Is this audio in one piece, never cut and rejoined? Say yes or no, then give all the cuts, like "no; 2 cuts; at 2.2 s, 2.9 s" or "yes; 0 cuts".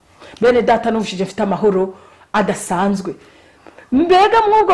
yes; 0 cuts